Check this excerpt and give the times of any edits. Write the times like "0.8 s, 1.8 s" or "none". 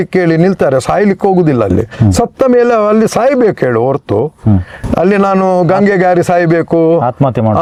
none

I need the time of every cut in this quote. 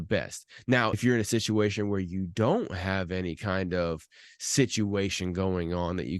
0.9 s

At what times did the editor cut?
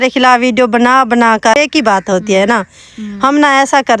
1.6 s

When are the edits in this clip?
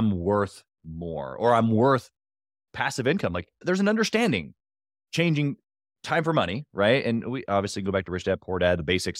3.6 s

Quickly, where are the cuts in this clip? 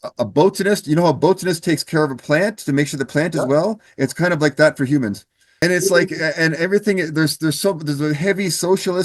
5.6 s

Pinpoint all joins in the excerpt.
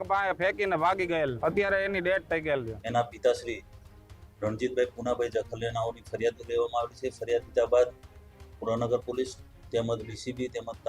1.4 s, 2.8 s

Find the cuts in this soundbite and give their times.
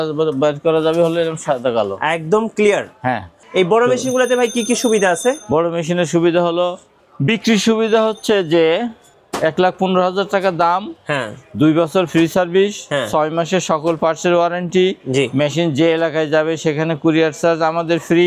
3.4 s

